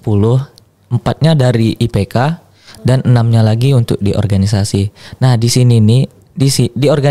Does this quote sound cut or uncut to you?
uncut